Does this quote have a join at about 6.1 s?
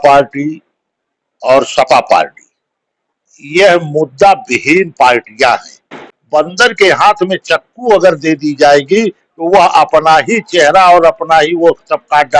yes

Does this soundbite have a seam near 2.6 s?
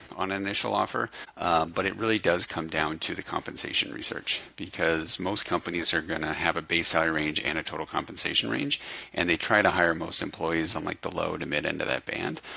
no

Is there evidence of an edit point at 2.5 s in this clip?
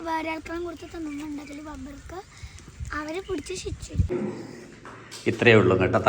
no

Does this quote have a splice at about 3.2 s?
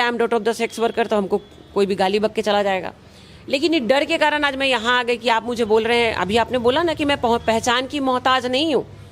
no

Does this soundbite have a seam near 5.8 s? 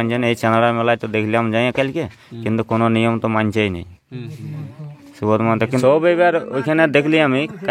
yes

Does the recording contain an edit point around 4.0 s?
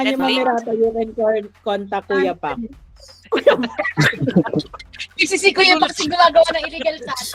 no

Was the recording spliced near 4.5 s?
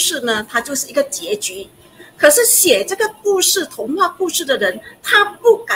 no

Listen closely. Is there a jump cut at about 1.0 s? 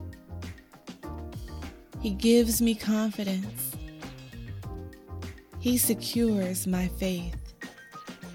no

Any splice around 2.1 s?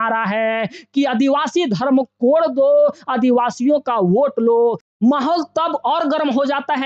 no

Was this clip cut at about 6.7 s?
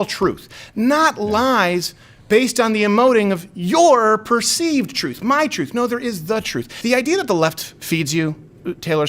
yes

